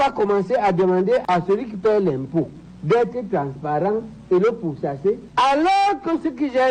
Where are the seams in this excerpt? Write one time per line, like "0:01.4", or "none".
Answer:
0:01.2
0:05.2

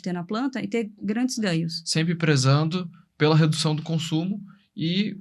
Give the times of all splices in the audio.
0:01.8

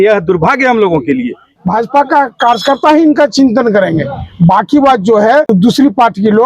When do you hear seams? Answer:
0:01.4
0:05.5

